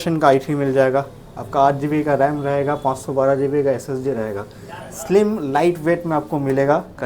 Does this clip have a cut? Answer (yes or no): no